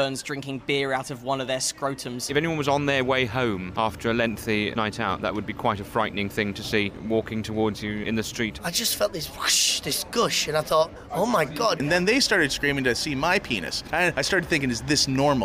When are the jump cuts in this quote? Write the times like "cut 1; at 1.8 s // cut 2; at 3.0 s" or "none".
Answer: cut 1; at 2.3 s // cut 2; at 3.7 s // cut 3; at 4.7 s // cut 4; at 7.0 s // cut 5; at 8.5 s // cut 6; at 11.8 s // cut 7; at 14.1 s